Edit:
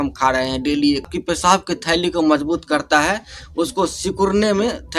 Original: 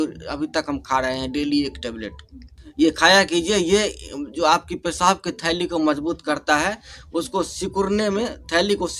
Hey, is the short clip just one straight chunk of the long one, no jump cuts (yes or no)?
no